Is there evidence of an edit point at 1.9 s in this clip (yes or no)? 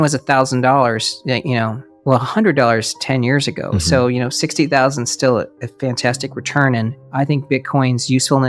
yes